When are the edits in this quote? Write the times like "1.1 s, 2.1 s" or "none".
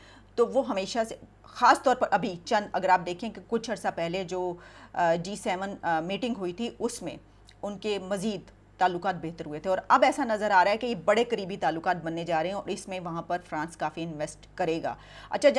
none